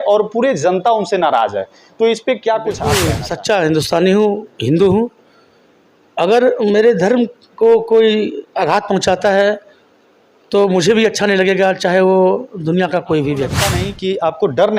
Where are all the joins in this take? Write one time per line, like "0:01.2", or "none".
0:03.1
0:13.9